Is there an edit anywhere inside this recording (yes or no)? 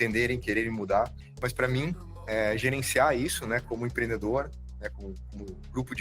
yes